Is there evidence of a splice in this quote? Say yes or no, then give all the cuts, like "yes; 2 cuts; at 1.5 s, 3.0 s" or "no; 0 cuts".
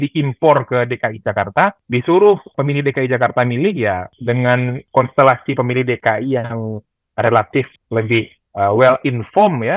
yes; 5 cuts; at 1.8 s, 2.5 s, 4.1 s, 4.8 s, 8.0 s